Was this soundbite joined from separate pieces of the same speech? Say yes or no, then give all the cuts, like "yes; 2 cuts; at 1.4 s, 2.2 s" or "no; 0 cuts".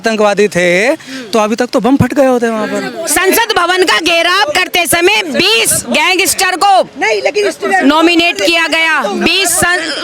yes; 1 cut; at 3.1 s